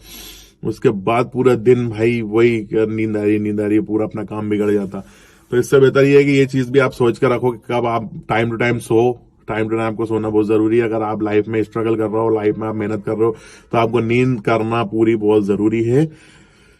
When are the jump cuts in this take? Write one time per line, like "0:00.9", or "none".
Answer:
none

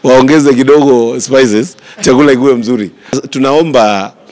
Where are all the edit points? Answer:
0:03.2

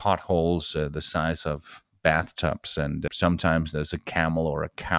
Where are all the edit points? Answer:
none

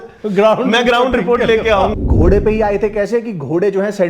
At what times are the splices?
0:01.9

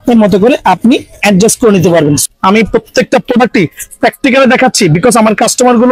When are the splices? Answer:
0:02.2

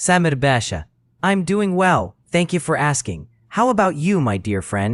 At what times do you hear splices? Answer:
none

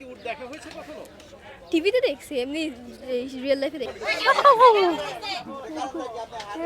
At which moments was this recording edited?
0:03.9

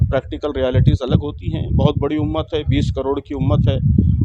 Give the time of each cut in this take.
none

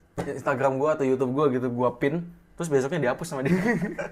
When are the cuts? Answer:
none

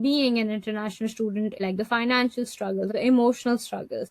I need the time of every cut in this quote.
0:01.6
0:02.9

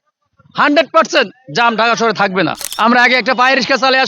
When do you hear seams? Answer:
0:02.6

